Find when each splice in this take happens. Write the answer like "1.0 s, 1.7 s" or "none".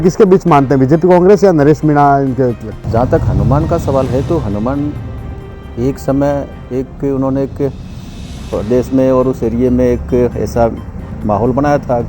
2.8 s